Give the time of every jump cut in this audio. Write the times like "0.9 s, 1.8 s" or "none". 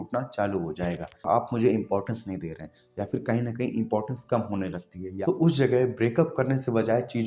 1.2 s, 5.1 s